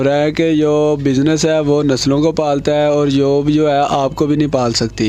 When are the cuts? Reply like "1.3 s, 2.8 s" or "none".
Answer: none